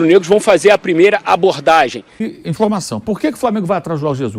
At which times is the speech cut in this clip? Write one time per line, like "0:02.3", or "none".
0:02.3